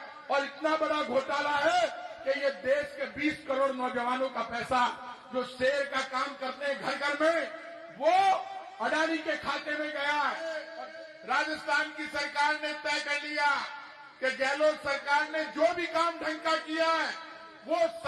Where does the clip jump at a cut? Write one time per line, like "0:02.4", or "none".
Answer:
0:10.7